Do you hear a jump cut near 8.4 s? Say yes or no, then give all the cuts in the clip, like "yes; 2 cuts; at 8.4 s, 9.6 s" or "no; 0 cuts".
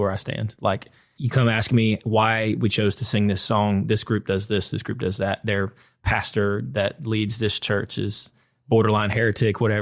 no; 1 cut; at 1.2 s